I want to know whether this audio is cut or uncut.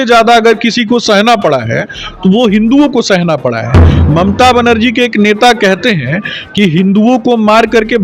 uncut